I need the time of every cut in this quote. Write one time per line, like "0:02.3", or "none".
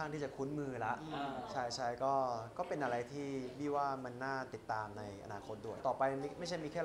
0:05.8